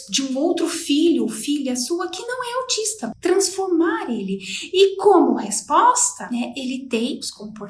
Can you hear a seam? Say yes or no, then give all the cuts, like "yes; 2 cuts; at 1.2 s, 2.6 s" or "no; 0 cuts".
yes; 1 cut; at 3.1 s